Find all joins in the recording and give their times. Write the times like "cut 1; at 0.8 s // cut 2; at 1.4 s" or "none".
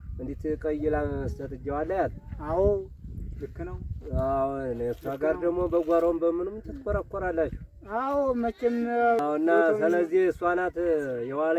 cut 1; at 9.2 s

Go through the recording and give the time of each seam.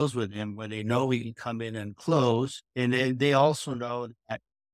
cut 1; at 2.6 s

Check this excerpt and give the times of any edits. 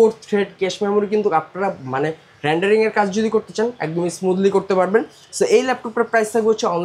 none

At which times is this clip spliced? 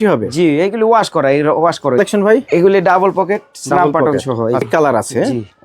cut 1; at 2.0 s // cut 2; at 4.7 s

